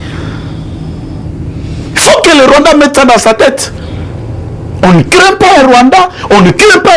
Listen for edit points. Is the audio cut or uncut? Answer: uncut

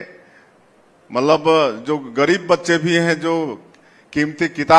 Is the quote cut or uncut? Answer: uncut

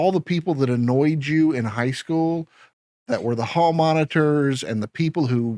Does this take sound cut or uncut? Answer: uncut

